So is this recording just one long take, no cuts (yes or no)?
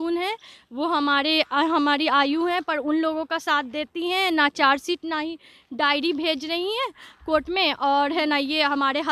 yes